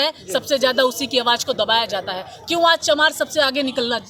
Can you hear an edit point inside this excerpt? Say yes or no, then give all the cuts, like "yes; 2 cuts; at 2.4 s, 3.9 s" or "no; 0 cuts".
no; 0 cuts